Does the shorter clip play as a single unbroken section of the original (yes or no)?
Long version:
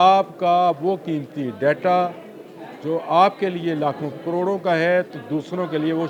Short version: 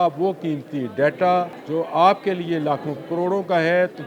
no